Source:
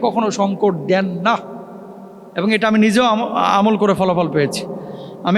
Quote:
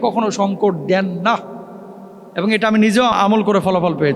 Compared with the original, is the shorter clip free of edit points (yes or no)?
no